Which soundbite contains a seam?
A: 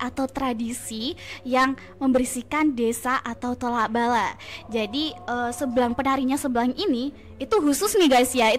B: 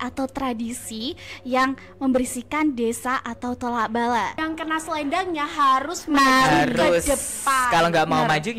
B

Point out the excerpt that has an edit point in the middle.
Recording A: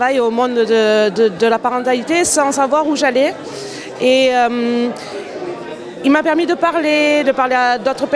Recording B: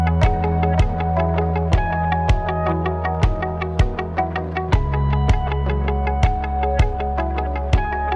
B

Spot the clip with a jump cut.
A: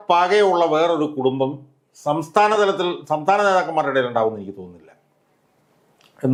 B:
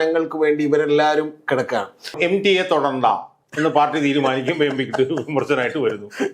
B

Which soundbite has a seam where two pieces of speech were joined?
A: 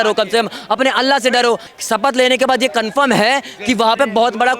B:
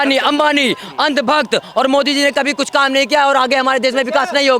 A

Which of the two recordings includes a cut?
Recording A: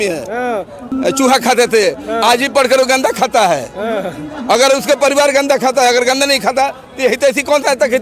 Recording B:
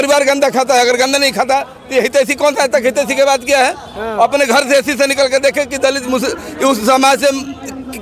A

